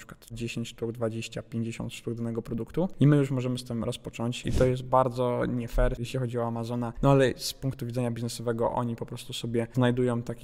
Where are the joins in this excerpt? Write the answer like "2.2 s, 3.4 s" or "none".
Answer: 2.9 s, 4.4 s